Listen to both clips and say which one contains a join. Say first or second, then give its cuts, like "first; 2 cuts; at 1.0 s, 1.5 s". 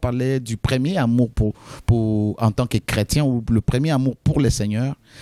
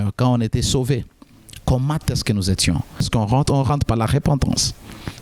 second; 1 cut; at 3.1 s